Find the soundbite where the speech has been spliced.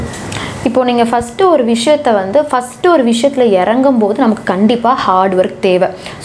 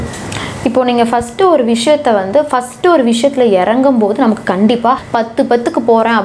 second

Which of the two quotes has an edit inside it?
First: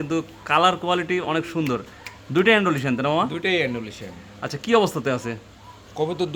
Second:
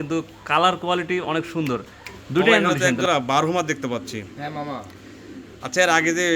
second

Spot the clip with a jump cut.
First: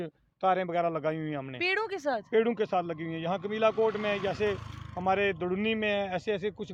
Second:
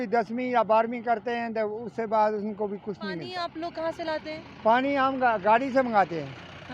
second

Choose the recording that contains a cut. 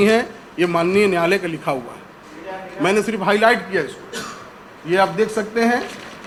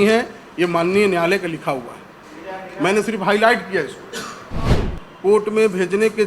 second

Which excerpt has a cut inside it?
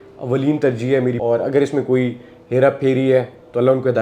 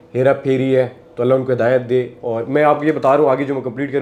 first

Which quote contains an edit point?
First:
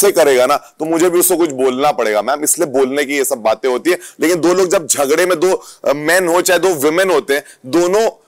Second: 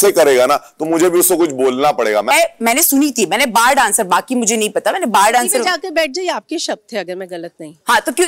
second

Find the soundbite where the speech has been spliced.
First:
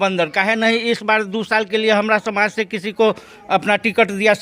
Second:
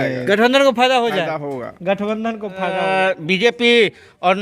second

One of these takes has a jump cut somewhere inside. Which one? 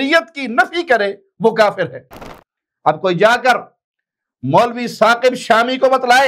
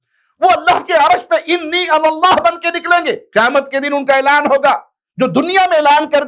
first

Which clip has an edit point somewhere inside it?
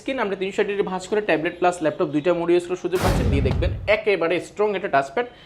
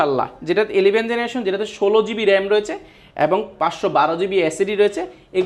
first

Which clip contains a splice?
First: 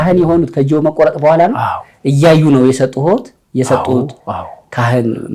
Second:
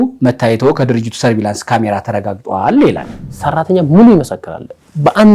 second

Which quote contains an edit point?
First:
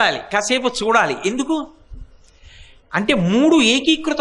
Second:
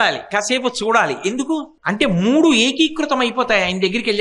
second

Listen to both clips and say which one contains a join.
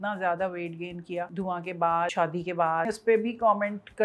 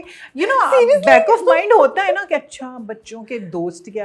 first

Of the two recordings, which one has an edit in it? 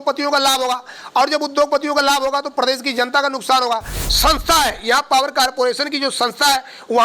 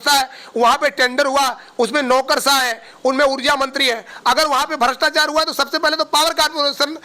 first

